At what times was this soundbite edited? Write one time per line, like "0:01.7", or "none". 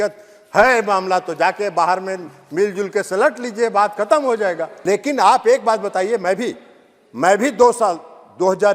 0:04.7